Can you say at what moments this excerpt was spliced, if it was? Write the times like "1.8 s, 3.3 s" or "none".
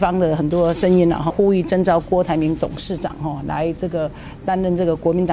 1.3 s